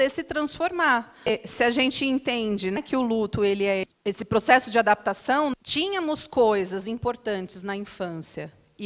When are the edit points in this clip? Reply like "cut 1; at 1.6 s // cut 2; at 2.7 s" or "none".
cut 1; at 1.3 s // cut 2; at 2.8 s // cut 3; at 3.8 s // cut 4; at 5.5 s